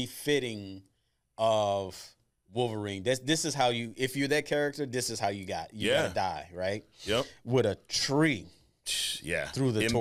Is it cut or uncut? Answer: uncut